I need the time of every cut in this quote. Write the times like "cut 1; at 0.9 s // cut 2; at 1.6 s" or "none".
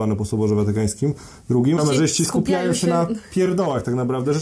cut 1; at 1.8 s